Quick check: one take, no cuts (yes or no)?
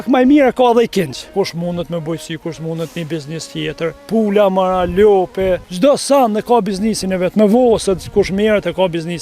no